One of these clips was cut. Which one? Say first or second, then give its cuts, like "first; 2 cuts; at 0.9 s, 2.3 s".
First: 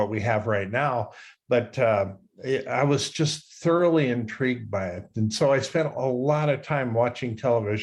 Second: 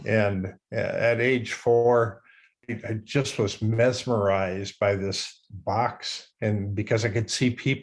second; 2 cuts; at 2.6 s, 5.3 s